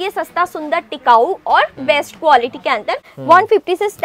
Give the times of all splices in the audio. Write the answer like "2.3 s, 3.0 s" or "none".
3.1 s